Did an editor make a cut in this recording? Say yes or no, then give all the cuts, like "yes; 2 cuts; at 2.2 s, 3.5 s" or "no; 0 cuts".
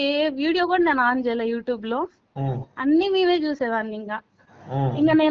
no; 0 cuts